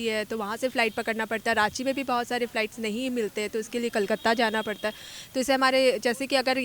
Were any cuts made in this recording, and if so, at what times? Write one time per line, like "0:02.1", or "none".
none

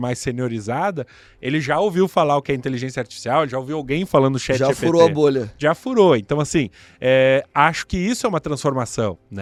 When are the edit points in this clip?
none

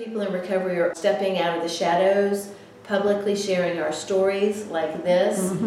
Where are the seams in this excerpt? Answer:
0:01.0

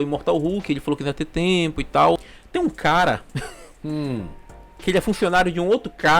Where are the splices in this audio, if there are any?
0:02.4

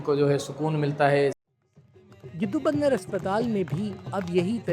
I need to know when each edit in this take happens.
0:01.3

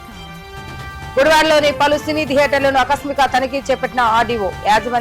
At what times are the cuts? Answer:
0:01.1

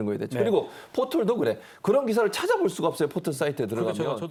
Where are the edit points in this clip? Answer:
none

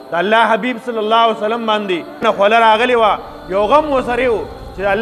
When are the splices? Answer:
0:02.2

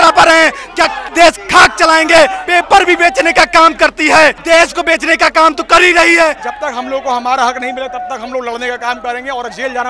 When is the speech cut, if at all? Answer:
0:01.0
0:02.4
0:04.4
0:06.5

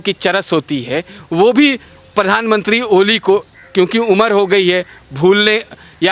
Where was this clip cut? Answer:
none

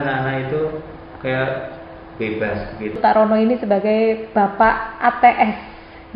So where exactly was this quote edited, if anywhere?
0:03.0

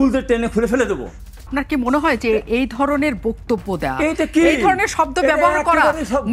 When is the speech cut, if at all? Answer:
0:01.5

